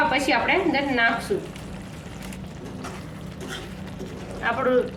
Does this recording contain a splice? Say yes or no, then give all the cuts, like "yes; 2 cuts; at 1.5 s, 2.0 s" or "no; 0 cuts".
no; 0 cuts